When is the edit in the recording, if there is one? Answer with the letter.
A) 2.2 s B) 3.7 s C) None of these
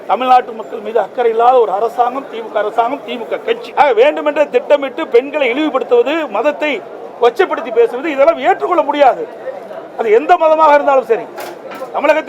B